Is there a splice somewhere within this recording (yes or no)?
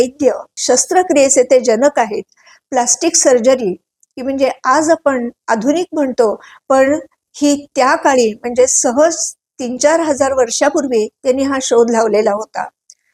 no